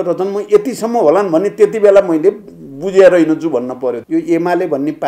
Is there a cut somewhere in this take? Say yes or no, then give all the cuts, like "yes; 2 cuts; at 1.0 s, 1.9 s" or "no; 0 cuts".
yes; 1 cut; at 4.0 s